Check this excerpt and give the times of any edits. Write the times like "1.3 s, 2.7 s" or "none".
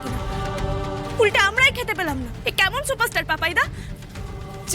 1.1 s, 2.3 s